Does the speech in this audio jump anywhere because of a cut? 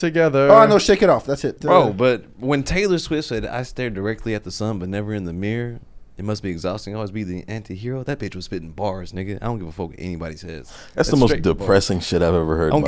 yes; 1 cut; at 1.5 s

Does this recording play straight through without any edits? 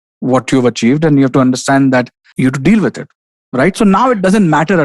no; 1 cut; at 2.2 s

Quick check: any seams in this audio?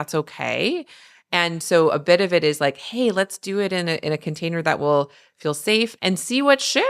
yes; 1 cut; at 5.9 s

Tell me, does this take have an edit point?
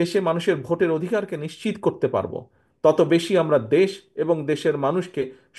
no; 0 cuts

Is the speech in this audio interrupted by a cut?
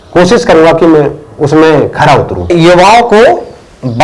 yes; 1 cut; at 2.5 s

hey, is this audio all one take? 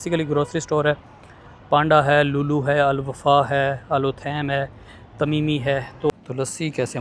no; 1 cut; at 6.1 s

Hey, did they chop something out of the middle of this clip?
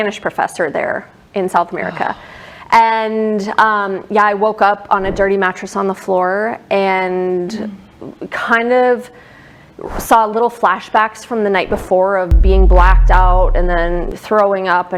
no; 0 cuts

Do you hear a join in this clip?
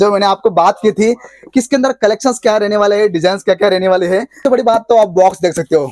yes; 1 cut; at 4.4 s

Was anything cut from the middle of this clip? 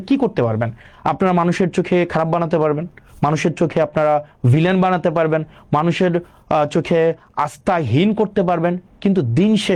no; 0 cuts

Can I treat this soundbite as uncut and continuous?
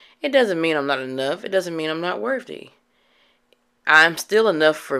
yes; 0 cuts

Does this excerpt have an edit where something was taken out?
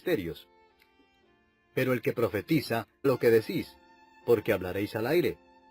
no; 0 cuts

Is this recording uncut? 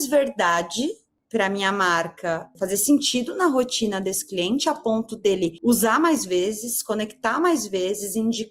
no; 3 cuts; at 1.1 s, 2.5 s, 5.6 s

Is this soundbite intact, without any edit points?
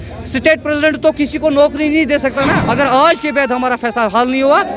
no; 1 cut; at 2.6 s

